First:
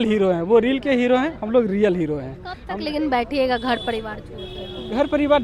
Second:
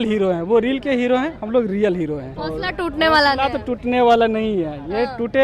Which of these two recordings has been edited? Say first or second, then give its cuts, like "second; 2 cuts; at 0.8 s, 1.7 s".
second; 1 cut; at 2.3 s